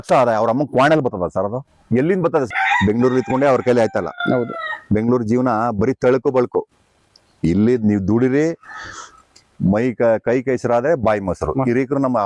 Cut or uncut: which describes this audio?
cut